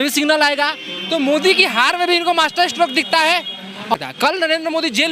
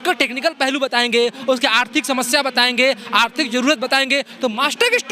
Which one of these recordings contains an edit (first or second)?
first